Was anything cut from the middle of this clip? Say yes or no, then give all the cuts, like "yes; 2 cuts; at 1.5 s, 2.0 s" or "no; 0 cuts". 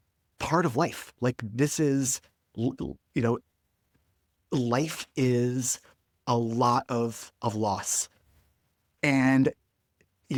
no; 0 cuts